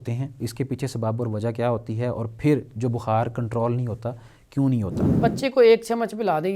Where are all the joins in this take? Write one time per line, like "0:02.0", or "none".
0:05.1